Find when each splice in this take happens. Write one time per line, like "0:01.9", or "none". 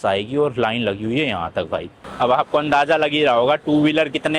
0:02.0